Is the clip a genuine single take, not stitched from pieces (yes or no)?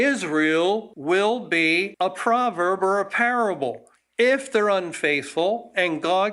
no